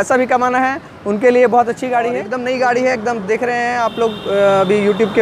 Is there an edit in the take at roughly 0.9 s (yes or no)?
no